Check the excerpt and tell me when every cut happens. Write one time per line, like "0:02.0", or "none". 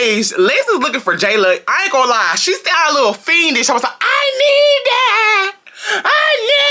none